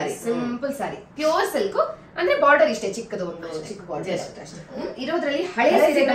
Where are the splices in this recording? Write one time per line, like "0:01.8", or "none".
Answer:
0:04.9